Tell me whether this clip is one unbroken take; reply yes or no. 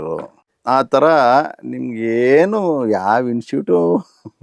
yes